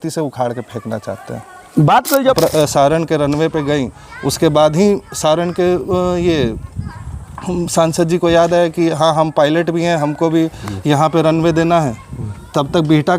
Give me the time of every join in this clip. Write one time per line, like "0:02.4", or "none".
0:02.3